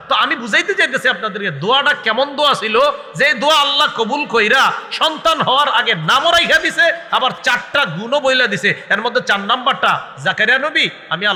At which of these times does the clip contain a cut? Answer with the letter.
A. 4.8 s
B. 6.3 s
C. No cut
C